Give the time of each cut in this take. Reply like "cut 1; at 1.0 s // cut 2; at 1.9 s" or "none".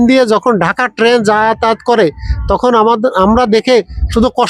none